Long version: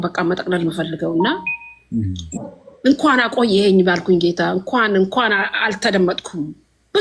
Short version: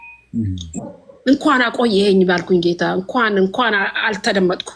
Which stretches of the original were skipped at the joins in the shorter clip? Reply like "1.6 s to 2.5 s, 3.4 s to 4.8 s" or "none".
none